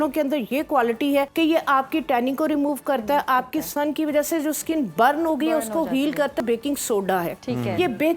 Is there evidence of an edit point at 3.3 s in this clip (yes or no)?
no